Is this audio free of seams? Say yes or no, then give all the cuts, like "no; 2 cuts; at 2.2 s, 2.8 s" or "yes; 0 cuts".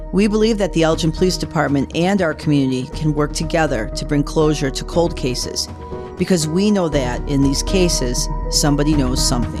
yes; 0 cuts